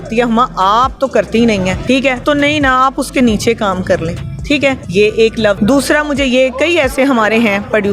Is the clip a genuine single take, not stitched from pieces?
no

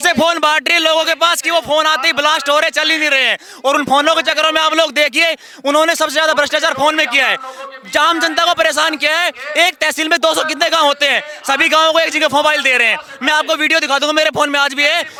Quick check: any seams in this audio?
no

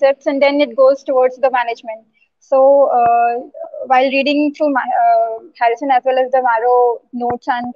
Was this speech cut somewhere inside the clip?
no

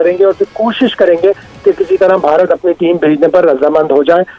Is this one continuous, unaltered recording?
yes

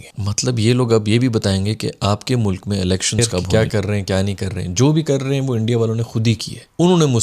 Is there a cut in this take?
yes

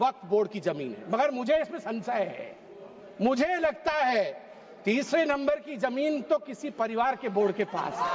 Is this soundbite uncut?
yes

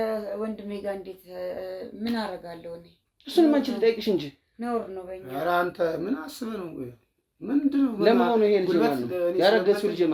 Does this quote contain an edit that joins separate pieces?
no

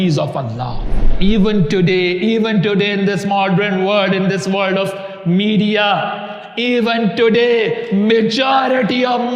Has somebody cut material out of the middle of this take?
yes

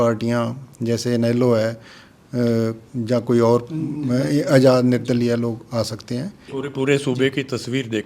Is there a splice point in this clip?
yes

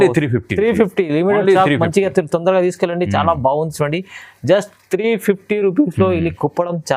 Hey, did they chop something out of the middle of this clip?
no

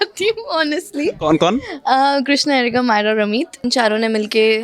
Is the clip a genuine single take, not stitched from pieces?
no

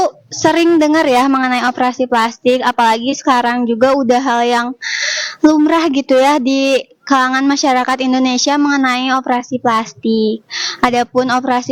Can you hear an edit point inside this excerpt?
no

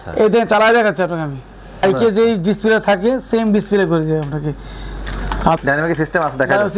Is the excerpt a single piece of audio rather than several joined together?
no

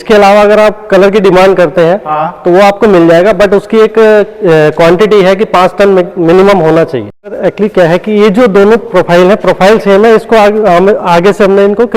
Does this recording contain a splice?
yes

